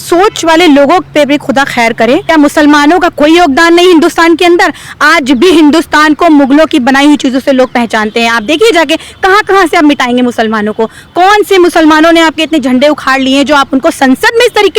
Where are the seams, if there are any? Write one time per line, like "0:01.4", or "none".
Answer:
0:02.2